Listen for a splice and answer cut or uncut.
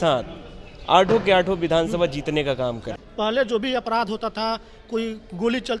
cut